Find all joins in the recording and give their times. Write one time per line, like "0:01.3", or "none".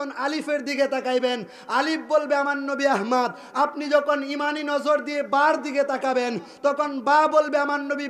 none